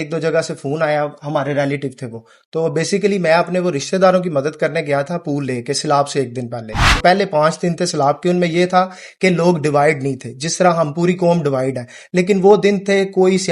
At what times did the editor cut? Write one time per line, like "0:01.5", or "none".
0:06.9